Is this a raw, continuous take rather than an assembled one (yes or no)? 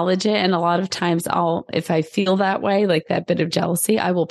yes